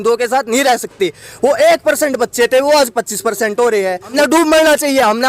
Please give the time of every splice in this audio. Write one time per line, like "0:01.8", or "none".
0:04.1

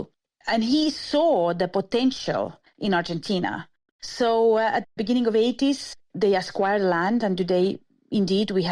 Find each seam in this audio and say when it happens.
0:02.6
0:03.9

